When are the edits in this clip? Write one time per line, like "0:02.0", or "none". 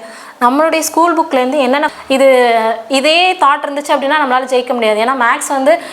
0:01.9